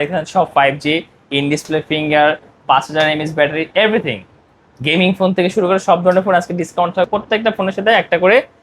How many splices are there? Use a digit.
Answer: 1